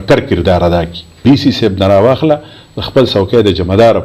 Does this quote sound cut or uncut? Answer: cut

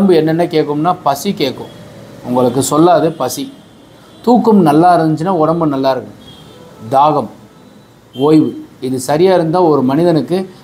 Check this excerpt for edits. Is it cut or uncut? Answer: uncut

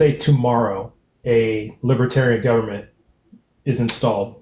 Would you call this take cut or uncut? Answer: uncut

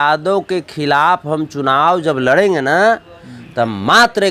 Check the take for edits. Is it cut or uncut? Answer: uncut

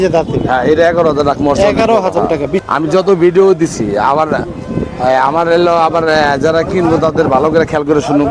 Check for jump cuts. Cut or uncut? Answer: cut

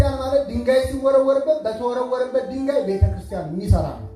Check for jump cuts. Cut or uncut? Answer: uncut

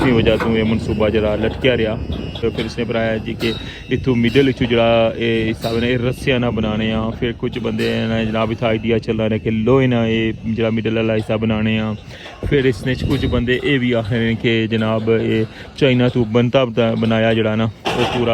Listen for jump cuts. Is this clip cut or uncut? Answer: cut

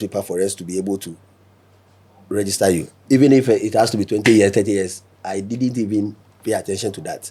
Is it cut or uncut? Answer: uncut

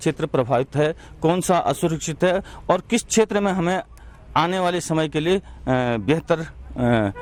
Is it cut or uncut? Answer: uncut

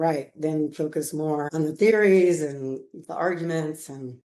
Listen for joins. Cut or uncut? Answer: cut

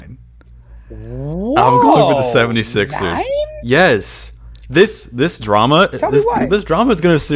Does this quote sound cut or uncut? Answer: uncut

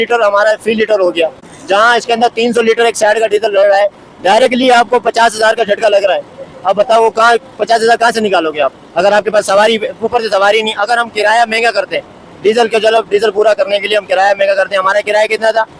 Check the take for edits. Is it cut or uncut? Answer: uncut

